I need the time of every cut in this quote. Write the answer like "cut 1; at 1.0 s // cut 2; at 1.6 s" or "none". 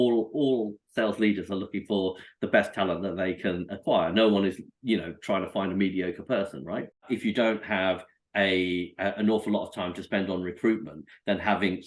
cut 1; at 7.0 s